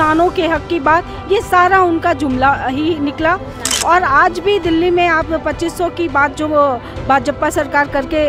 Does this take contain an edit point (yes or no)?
no